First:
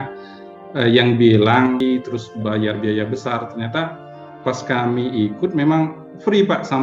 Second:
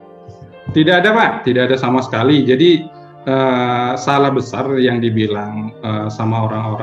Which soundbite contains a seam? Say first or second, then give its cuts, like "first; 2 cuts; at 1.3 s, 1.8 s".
first; 1 cut; at 1.8 s